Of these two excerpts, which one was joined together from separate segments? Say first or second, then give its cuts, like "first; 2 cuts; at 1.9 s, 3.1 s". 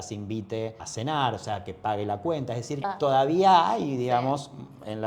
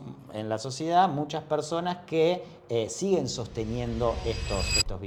first; 2 cuts; at 0.8 s, 2.9 s